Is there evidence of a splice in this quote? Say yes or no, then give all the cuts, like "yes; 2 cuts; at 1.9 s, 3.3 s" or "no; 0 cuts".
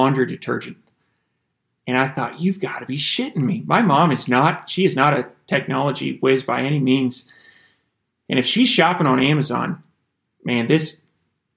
no; 0 cuts